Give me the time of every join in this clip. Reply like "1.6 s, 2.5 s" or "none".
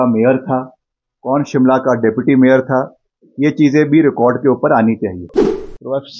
5.3 s